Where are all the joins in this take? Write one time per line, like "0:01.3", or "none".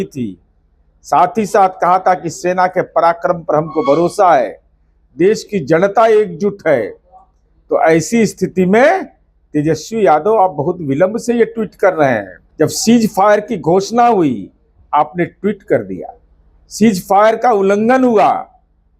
0:12.4